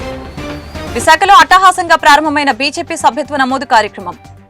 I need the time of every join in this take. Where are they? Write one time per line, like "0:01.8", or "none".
0:00.9